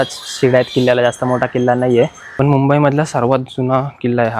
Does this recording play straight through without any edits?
no; 1 cut; at 2.2 s

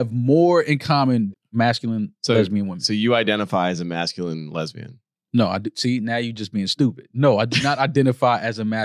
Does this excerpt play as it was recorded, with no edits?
no; 1 cut; at 1.3 s

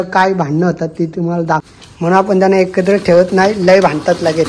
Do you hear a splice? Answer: yes; 1 cut; at 1.7 s

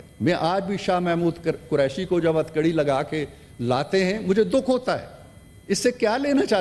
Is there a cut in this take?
no; 0 cuts

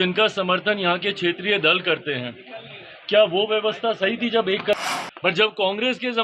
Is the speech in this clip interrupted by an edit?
yes; 1 cut; at 4.8 s

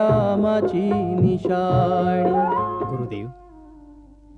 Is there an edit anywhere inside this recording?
yes; 1 cut; at 2.8 s

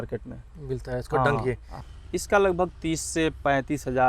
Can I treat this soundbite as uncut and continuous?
no; 1 cut; at 1.7 s

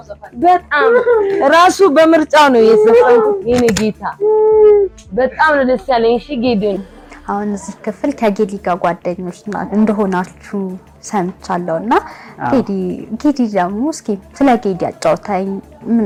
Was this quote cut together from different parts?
no; 0 cuts

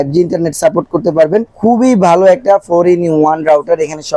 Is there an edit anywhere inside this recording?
no; 0 cuts

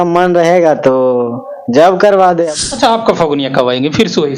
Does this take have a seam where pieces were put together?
yes; 1 cut; at 2.5 s

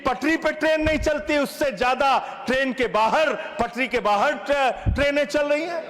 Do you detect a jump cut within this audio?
no; 0 cuts

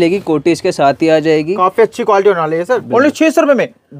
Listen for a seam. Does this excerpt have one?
yes; 1 cut; at 2.8 s

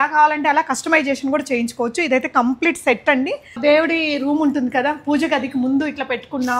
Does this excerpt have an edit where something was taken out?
yes; 1 cut; at 3.6 s

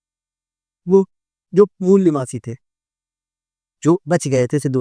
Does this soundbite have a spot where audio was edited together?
no; 0 cuts

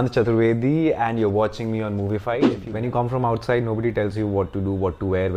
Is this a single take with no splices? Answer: no; 1 cut; at 2.6 s

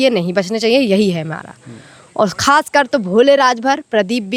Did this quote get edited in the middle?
no; 0 cuts

